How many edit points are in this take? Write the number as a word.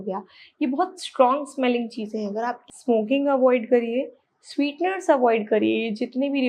one